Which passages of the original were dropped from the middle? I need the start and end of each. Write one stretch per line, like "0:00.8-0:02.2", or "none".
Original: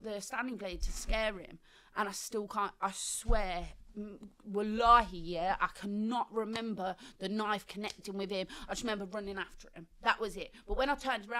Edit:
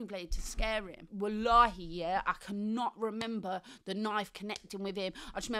0:01.5-0:04.3